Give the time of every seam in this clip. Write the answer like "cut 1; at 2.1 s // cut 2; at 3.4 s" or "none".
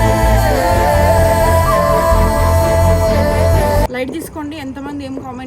cut 1; at 3.9 s

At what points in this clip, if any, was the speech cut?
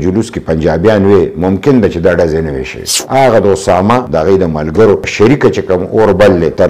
cut 1; at 2.9 s // cut 2; at 4.1 s

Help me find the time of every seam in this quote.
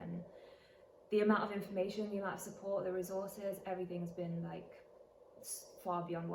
none

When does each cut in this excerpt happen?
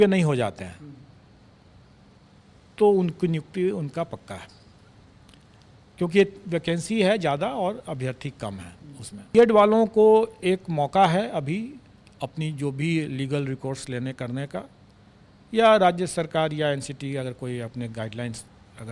cut 1; at 9.3 s

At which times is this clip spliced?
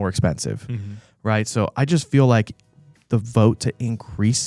none

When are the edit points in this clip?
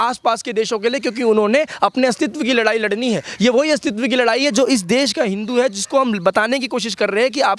none

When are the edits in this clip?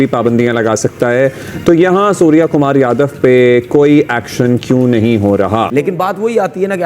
cut 1; at 5.7 s

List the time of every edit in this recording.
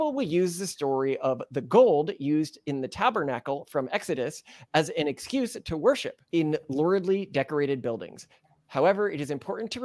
none

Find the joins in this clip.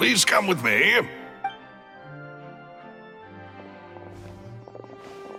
none

